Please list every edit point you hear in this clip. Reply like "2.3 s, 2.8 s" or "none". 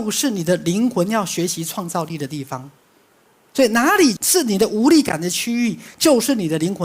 4.2 s